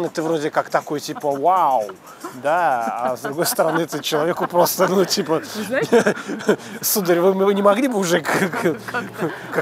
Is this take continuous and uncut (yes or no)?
yes